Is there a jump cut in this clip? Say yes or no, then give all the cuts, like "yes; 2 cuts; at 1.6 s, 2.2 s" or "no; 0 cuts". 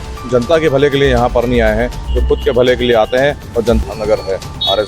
yes; 1 cut; at 3.8 s